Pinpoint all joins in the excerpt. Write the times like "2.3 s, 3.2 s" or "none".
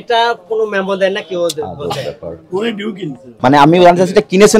3.2 s